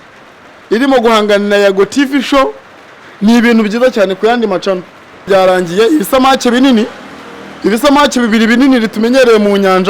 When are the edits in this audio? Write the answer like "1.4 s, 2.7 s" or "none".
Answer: 5.3 s